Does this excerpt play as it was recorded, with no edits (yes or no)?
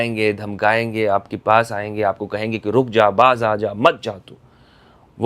yes